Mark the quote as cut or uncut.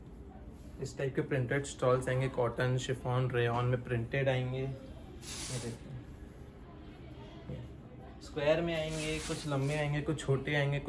uncut